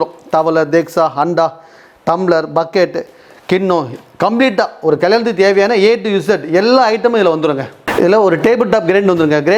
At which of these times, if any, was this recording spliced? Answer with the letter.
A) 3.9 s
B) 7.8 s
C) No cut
C